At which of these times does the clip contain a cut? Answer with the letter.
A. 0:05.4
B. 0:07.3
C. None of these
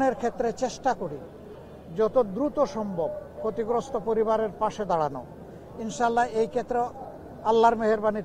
C